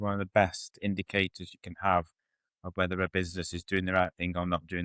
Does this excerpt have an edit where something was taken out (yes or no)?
no